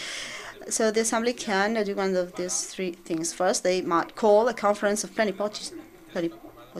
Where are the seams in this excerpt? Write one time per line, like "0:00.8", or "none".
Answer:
0:03.9

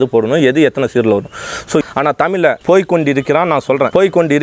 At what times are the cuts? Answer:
0:01.4

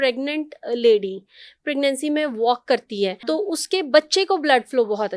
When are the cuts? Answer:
0:03.2

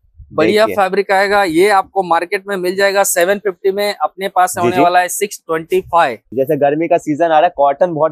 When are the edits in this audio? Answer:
0:06.3

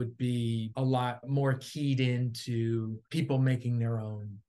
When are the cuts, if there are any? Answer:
0:00.9
0:03.0

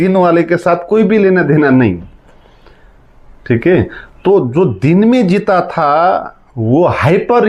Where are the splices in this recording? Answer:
none

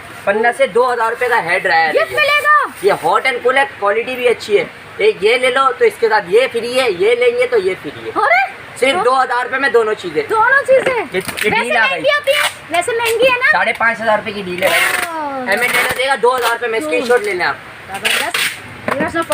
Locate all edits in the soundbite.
none

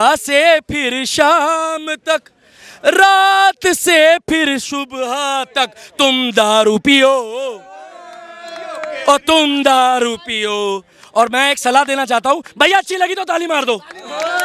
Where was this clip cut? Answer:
none

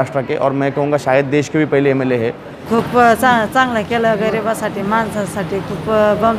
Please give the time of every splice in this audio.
0:02.6

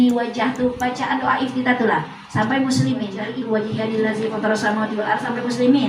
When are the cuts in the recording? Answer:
0:03.2

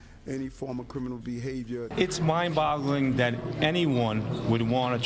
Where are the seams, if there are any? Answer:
0:01.8

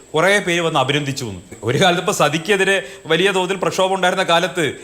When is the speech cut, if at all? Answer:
0:01.5

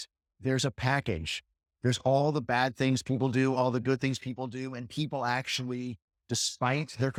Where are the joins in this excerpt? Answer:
none

